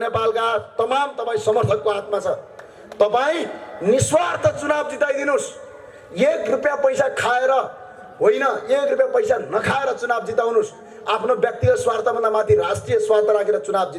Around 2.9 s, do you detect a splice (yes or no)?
no